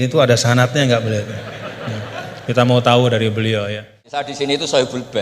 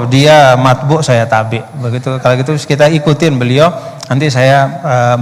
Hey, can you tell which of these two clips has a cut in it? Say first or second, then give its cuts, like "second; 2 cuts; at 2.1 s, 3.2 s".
first; 1 cut; at 4.0 s